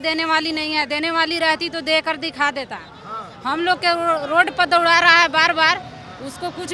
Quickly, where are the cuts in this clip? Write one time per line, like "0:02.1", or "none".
none